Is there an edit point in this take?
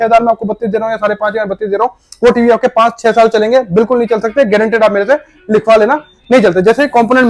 no; 0 cuts

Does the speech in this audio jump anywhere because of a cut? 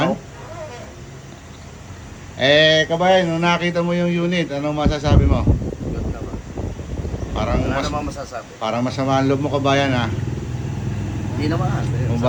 no; 0 cuts

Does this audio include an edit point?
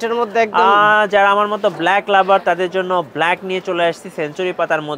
no; 0 cuts

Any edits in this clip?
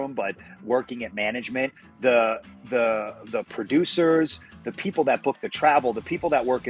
no; 0 cuts

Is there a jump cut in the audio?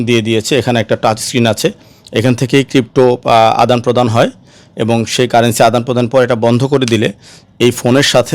no; 0 cuts

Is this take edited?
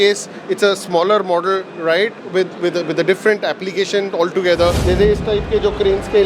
yes; 1 cut; at 4.8 s

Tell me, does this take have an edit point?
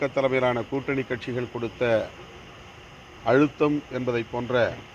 no; 0 cuts

